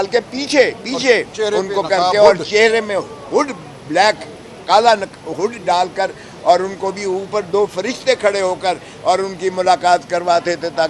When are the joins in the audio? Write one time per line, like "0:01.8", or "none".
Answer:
none